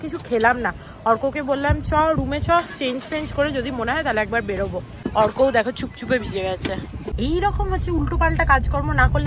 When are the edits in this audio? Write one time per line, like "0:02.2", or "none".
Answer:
none